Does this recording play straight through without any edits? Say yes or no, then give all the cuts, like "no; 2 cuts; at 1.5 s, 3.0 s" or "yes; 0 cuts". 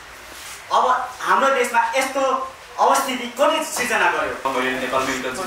no; 1 cut; at 4.5 s